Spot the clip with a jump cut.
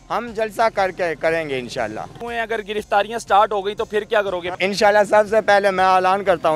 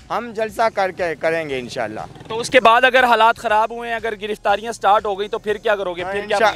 first; 2 cuts; at 2.2 s, 4.5 s

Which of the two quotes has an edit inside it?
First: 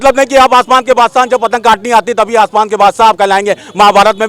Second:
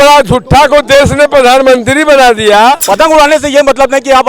second; 1 cut; at 2.8 s

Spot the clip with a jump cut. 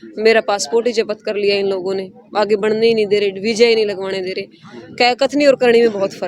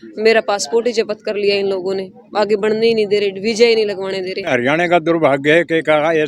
second; 1 cut; at 4.5 s

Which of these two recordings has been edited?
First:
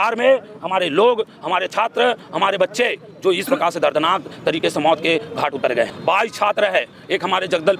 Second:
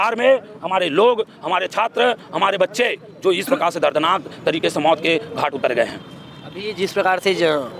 first; 1 cut; at 5.9 s

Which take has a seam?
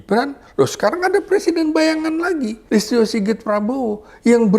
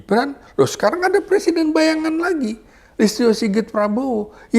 first; 1 cut; at 2.6 s

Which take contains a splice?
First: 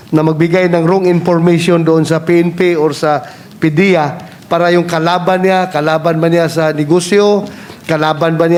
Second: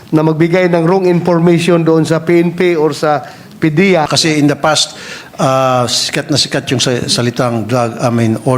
second; 1 cut; at 4.1 s

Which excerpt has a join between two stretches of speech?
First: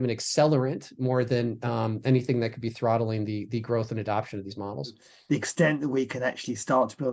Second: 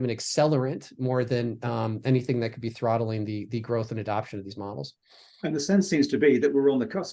first; 1 cut; at 5.1 s

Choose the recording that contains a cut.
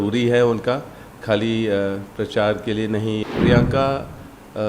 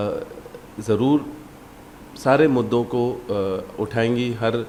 first; 1 cut; at 3.2 s

